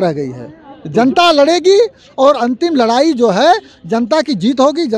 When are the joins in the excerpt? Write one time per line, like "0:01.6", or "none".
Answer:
none